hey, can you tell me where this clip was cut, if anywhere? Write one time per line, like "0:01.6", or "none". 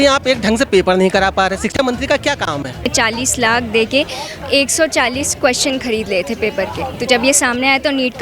0:02.9